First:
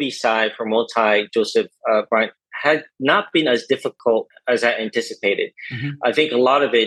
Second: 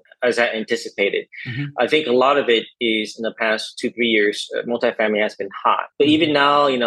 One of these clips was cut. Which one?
second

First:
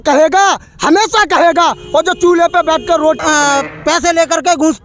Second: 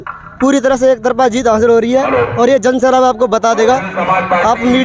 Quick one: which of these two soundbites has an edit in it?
first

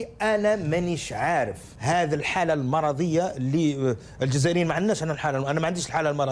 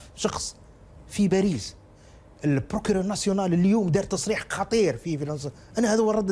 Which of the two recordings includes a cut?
first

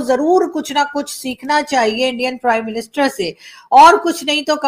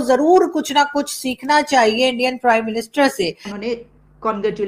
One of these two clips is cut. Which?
second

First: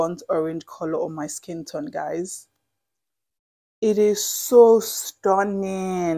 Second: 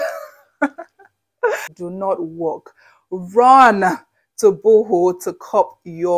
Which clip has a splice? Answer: second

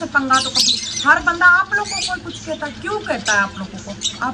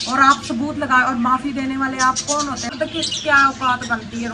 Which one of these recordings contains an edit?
second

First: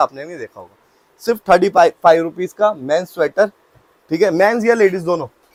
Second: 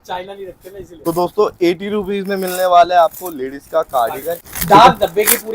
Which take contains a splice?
second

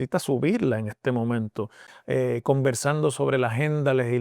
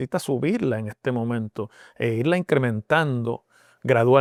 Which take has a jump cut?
first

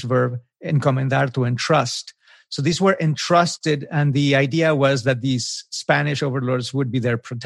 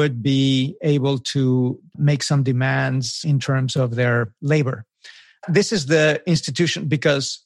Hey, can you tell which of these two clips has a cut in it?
second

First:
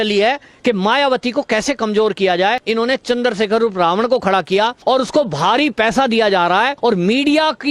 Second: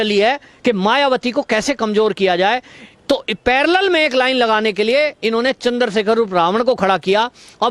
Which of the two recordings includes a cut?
first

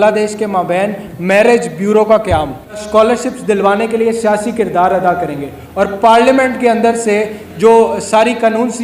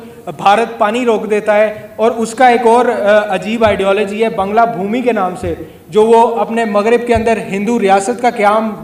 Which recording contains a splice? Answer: first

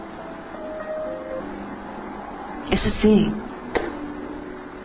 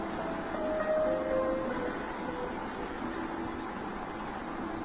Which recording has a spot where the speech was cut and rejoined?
second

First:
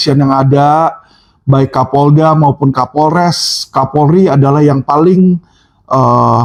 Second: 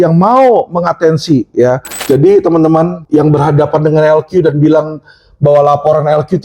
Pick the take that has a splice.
second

